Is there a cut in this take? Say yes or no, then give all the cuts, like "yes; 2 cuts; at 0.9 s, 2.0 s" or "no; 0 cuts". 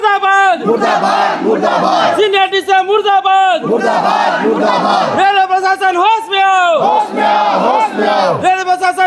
no; 0 cuts